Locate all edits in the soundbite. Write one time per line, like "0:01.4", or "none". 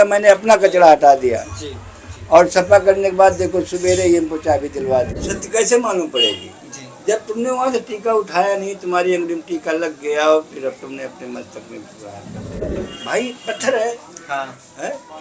0:05.2
0:12.6